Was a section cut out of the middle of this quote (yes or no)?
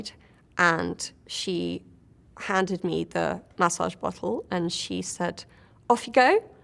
no